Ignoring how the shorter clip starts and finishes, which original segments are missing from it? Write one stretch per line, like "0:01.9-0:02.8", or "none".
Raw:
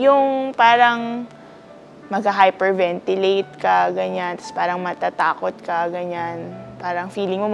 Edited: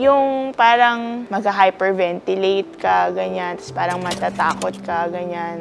0:01.2-0:02.0